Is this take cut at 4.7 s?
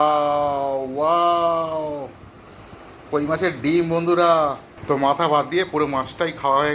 yes; 1 cut; at 4.7 s

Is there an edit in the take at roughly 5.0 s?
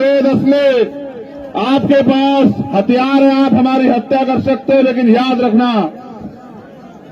no; 0 cuts

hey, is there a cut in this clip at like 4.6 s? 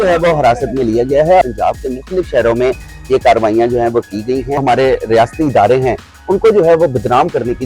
yes; 2 cuts; at 1.4 s, 4.6 s

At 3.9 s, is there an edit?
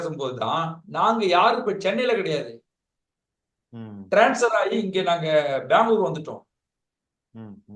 no; 0 cuts

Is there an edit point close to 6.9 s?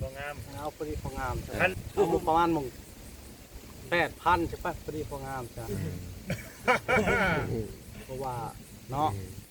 no; 1 cut; at 1.8 s

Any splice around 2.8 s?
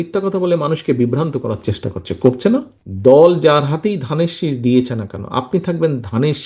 yes; 1 cut; at 2.8 s

